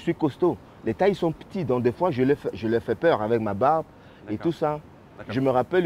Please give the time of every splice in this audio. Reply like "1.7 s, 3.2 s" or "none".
none

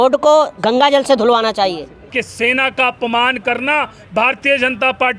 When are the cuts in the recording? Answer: 2.0 s

